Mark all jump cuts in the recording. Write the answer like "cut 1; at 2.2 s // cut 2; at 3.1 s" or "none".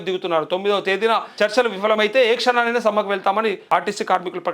cut 1; at 1.3 s // cut 2; at 3.6 s